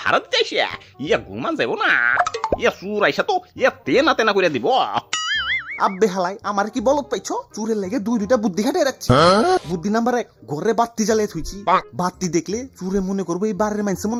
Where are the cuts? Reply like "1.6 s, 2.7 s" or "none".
none